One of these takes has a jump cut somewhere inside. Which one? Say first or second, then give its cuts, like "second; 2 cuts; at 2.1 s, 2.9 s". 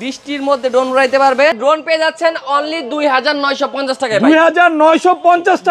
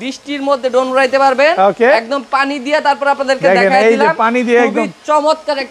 first; 1 cut; at 1.5 s